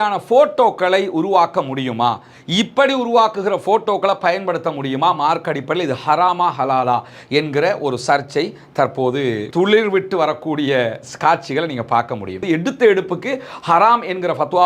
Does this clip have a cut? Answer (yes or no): yes